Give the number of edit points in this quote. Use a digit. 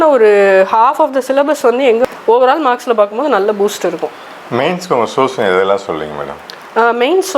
1